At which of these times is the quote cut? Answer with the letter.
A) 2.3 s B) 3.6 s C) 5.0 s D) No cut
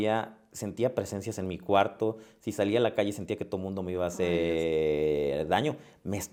D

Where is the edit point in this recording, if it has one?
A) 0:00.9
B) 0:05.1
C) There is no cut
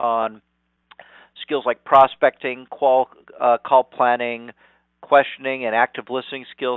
C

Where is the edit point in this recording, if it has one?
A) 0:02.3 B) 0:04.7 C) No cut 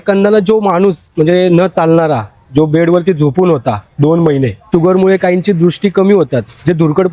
B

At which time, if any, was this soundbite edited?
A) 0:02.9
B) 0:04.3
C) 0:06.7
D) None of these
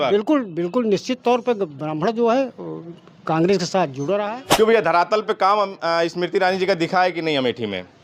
B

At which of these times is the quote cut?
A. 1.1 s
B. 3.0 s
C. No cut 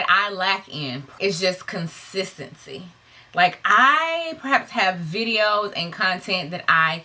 A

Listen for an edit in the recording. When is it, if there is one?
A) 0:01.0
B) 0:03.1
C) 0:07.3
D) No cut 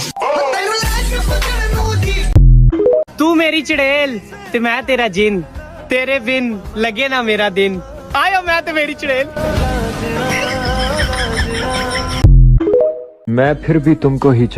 B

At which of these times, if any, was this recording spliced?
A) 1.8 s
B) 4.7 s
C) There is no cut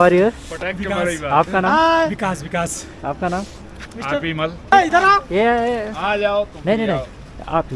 B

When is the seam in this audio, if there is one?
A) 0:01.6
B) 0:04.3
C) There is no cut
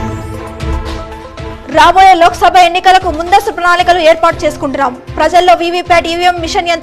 A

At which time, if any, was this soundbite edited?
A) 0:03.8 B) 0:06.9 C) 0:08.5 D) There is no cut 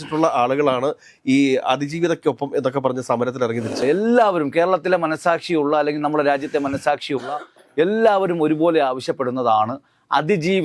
A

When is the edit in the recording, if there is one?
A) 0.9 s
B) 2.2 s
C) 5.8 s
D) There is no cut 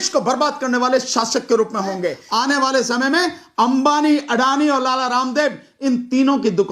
B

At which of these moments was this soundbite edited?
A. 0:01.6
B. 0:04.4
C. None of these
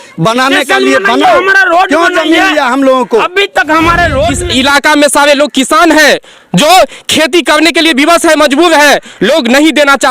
B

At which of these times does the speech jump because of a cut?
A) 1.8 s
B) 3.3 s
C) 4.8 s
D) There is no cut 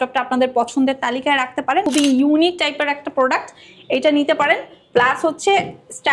A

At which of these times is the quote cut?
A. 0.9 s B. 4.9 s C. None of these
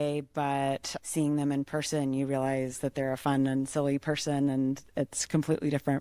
A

